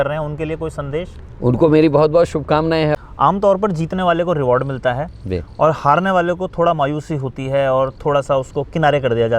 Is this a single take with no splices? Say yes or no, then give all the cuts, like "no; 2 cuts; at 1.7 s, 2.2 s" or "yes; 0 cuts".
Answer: no; 1 cut; at 2.9 s